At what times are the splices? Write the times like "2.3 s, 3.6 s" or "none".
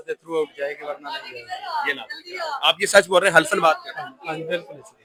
none